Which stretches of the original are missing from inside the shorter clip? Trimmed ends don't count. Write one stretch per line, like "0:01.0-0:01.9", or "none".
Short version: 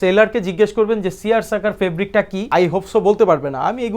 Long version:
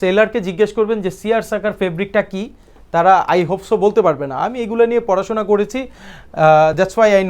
0:02.5-0:03.3